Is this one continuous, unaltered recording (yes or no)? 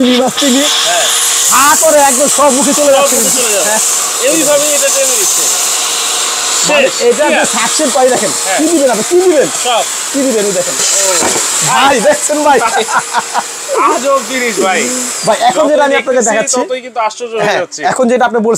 yes